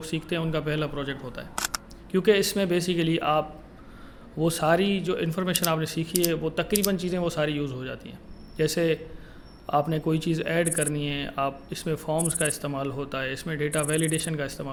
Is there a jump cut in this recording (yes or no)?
no